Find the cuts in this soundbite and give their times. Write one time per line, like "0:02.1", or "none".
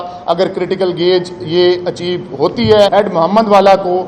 0:02.9

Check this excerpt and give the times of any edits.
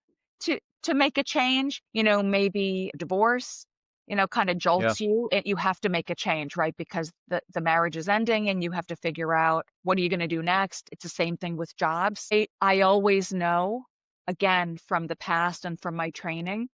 0:01.8
0:03.0
0:09.7
0:10.9
0:12.3

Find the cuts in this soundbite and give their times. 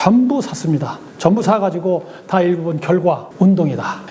none

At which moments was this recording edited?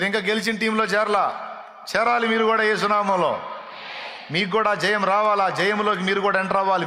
none

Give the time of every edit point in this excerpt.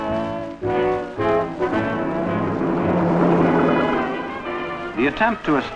0:01.1

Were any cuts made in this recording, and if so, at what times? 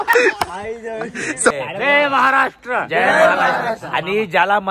0:01.5

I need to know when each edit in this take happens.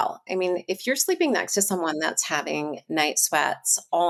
none

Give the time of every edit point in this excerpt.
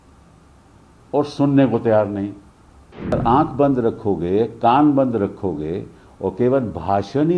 0:03.2

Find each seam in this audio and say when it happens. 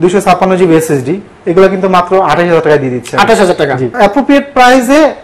0:03.9

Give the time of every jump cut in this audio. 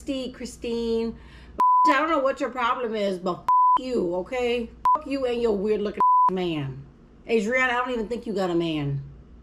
none

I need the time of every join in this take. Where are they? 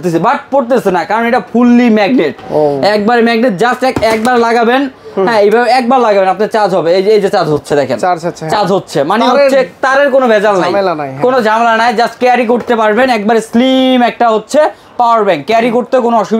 none

